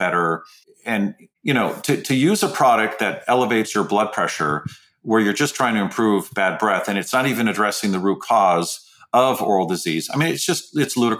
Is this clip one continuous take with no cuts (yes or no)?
no